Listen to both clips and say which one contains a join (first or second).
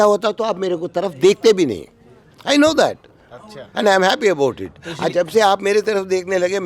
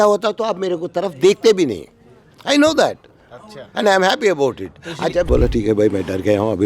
second